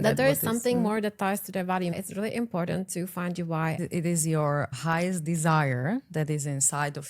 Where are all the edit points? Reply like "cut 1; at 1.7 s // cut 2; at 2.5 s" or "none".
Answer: cut 1; at 1.9 s // cut 2; at 3.8 s